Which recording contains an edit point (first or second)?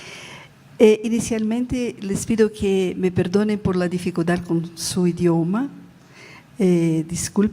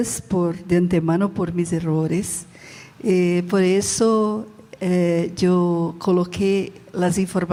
first